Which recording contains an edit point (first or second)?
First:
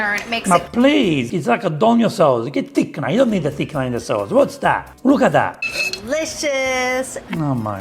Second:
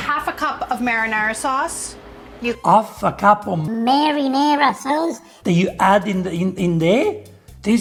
first